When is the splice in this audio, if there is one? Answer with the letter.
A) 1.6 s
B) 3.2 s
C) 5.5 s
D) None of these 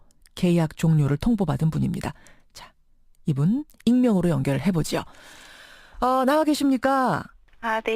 A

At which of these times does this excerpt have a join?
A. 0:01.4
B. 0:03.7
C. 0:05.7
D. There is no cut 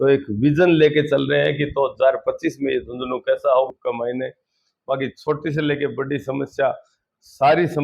B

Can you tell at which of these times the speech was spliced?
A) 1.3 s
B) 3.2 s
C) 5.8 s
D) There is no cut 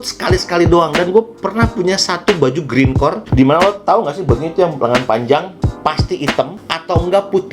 B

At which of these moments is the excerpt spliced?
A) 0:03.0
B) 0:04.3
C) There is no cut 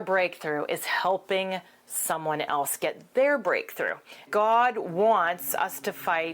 B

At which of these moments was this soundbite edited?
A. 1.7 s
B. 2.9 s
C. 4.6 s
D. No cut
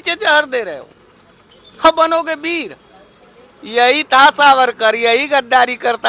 D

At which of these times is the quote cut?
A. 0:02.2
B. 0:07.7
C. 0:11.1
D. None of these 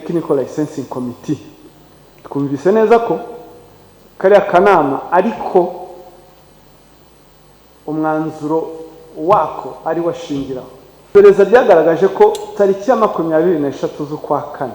C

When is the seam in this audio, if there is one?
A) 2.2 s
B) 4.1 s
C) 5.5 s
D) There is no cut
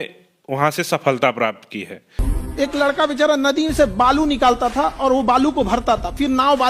A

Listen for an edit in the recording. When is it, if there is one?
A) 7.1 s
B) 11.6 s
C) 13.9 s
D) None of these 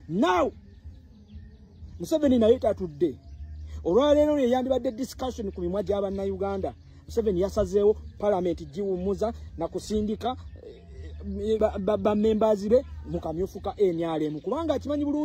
B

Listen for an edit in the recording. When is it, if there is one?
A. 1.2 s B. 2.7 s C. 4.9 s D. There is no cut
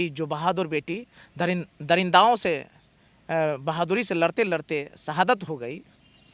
D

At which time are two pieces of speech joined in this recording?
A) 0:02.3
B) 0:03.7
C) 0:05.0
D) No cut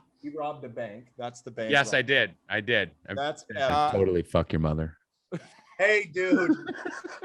B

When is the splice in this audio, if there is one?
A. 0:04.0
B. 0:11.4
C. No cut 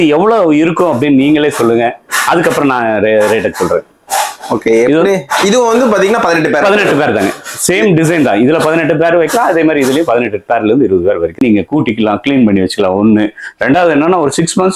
B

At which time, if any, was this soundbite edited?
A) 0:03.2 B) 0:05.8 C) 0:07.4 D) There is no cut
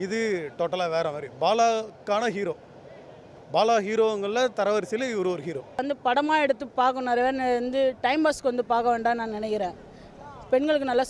B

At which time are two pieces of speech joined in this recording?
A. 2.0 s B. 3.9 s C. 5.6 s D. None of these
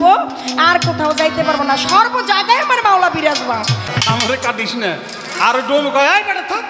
B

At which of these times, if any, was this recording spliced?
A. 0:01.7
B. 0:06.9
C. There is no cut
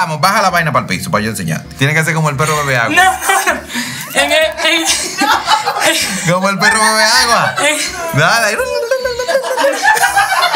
C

